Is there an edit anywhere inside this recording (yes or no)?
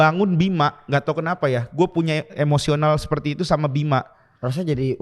no